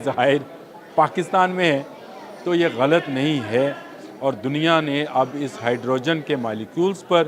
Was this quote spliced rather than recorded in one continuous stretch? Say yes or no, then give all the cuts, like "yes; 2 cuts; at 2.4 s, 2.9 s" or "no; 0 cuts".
no; 0 cuts